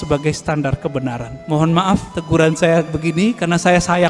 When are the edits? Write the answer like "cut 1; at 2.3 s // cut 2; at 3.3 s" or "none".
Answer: cut 1; at 1.3 s // cut 2; at 2.1 s